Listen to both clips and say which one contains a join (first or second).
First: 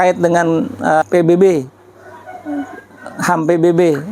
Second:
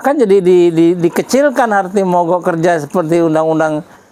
first